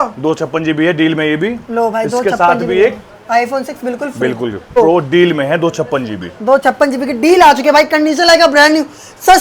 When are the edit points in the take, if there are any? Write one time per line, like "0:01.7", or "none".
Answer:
0:04.8